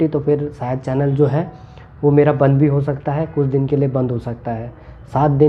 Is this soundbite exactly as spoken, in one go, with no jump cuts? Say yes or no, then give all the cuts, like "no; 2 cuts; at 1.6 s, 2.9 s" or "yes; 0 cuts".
yes; 0 cuts